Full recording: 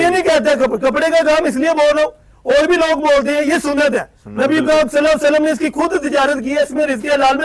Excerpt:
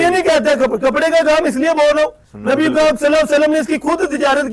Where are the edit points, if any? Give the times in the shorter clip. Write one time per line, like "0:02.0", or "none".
0:02.3

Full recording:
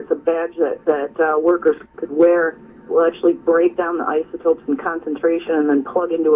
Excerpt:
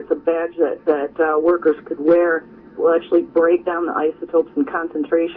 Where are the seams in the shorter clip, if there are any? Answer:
0:01.9

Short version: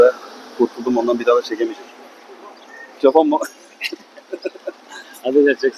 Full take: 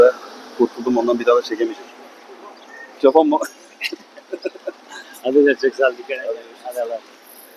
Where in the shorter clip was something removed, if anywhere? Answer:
none

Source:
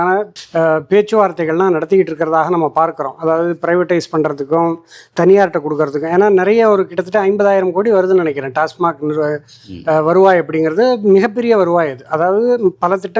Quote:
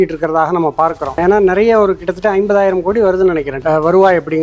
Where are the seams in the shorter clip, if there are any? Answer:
0:01.1
0:03.5

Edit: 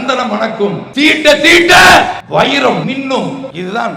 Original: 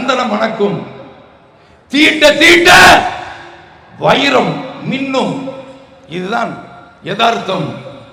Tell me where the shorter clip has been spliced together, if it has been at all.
0:00.8
0:02.2
0:03.0

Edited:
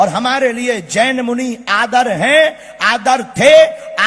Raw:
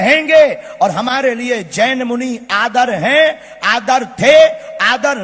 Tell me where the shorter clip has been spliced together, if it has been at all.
none

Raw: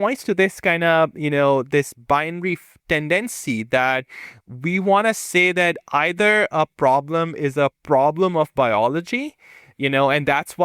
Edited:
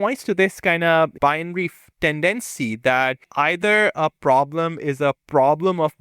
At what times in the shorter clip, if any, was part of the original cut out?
0:01.1
0:03.3

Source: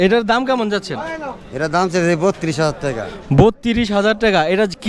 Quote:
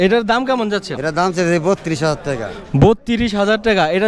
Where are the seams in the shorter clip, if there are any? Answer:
0:00.9

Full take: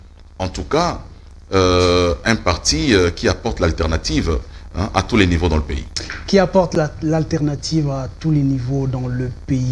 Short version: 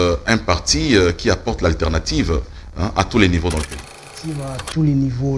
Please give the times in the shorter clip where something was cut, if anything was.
0:04.2

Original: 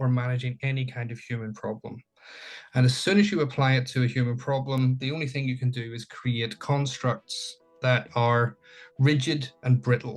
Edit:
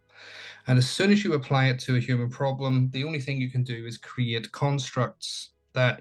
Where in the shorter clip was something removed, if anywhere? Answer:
none

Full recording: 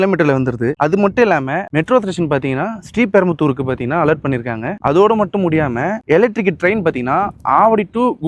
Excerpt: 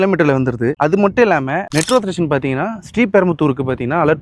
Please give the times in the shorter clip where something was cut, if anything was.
none

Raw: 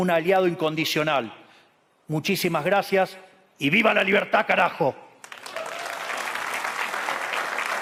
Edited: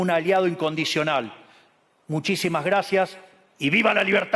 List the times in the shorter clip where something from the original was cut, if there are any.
none

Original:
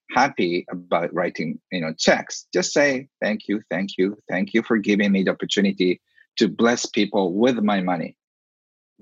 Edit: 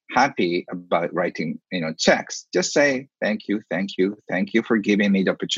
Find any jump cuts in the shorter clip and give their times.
none

